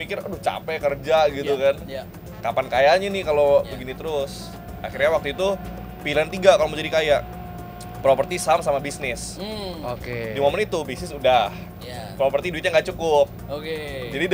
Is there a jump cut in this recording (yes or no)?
no